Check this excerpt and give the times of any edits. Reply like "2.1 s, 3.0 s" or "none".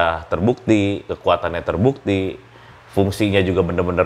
none